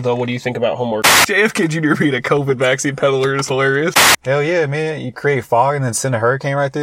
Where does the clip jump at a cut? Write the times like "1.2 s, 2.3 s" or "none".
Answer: 1.1 s, 4.2 s